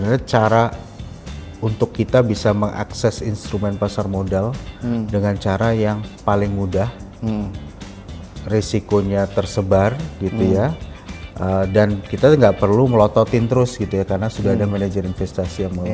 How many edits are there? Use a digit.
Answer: 0